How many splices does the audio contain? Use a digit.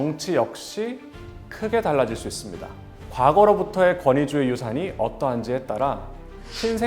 1